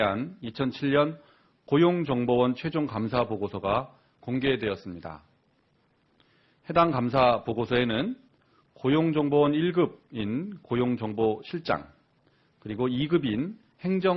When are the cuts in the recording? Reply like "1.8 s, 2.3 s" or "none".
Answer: 13.2 s